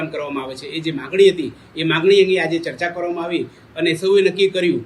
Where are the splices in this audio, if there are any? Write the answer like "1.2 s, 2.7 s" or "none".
none